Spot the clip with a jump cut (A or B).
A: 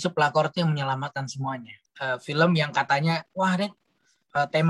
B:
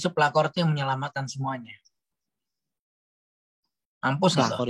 A